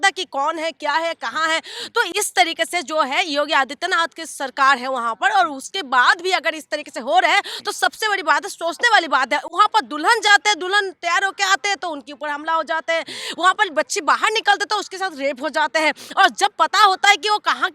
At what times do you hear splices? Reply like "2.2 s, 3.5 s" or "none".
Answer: none